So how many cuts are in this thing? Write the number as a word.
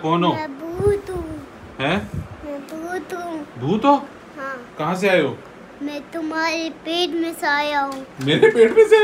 zero